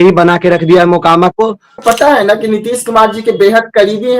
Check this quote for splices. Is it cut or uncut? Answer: cut